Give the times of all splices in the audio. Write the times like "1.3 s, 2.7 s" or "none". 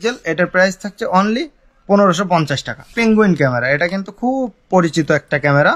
2.8 s